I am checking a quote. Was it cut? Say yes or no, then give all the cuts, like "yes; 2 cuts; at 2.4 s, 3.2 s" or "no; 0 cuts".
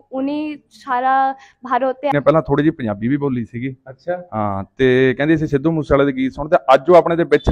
yes; 1 cut; at 2.1 s